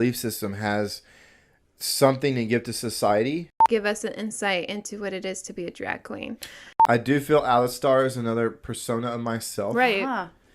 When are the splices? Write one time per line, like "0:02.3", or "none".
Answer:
0:03.5
0:06.6

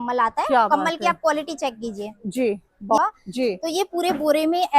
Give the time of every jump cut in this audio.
0:03.0

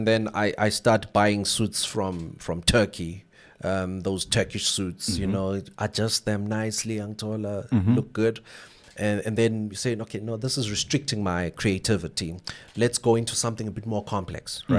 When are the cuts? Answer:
none

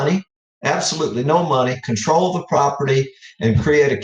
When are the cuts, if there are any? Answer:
none

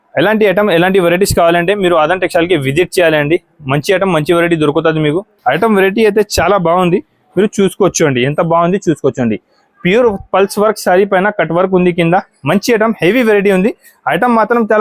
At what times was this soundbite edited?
0:05.3

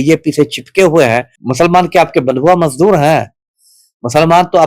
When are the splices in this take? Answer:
0:01.4

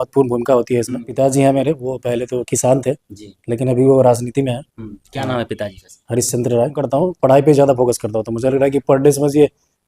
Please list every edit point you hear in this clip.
0:01.1
0:06.8

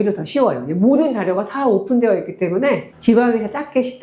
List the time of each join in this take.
0:02.9

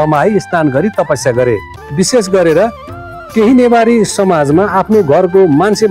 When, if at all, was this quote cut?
0:01.8

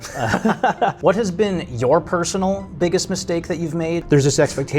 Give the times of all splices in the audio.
0:01.0
0:04.0

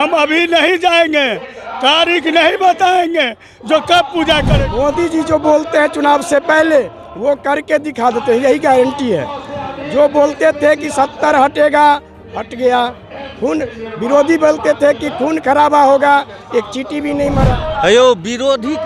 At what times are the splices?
0:04.5
0:17.5

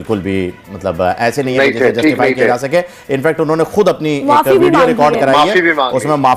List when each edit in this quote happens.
none

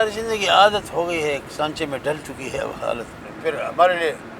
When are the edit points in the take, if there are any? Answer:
0:03.3

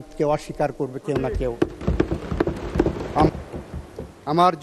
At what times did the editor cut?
0:03.3

